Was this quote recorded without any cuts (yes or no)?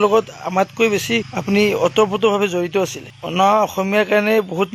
no